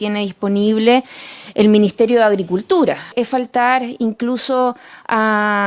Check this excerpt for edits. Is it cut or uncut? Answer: cut